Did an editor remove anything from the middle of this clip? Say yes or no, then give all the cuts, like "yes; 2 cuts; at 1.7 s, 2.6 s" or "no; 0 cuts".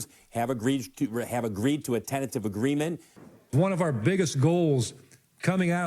yes; 1 cut; at 3.1 s